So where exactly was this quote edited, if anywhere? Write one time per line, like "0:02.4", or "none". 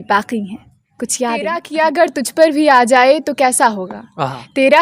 0:01.7

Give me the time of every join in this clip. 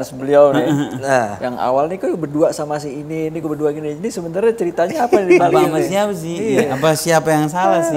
none

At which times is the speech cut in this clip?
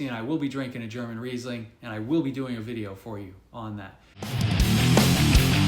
0:04.3

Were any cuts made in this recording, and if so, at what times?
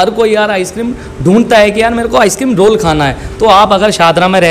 none

